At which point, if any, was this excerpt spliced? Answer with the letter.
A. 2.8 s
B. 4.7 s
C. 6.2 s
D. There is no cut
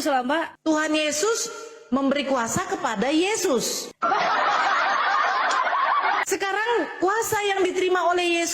C